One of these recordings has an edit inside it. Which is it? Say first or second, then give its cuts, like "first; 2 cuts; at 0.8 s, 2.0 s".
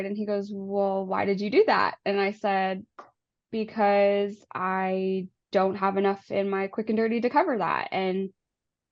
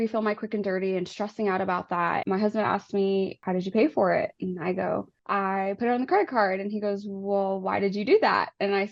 second; 3 cuts; at 2.2 s, 3.4 s, 5.2 s